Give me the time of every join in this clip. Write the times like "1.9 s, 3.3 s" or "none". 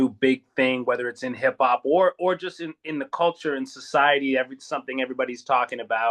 none